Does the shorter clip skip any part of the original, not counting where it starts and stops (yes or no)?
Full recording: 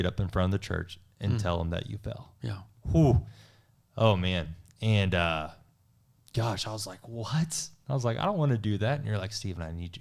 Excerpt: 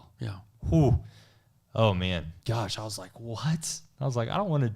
yes